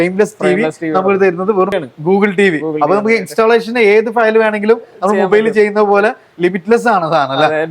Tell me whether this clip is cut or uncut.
cut